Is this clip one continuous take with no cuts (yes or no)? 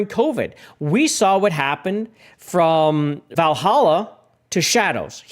no